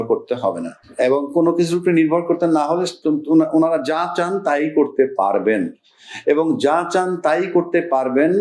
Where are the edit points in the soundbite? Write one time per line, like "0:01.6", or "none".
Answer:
none